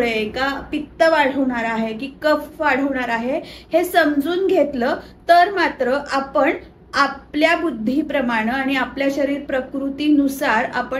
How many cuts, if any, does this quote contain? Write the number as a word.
zero